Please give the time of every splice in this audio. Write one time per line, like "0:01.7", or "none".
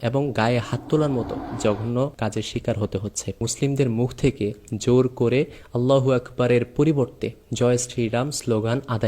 0:01.4
0:02.1
0:03.4